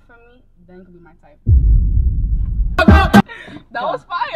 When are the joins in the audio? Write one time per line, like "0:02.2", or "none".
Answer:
0:03.2